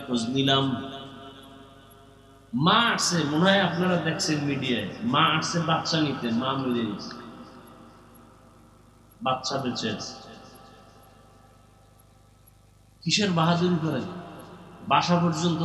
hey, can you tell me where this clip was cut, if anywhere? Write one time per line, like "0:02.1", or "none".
none